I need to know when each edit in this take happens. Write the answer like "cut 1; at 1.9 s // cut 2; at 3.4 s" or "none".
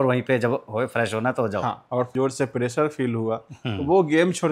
cut 1; at 2.1 s